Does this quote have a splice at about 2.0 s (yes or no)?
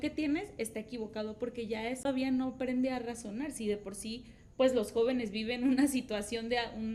yes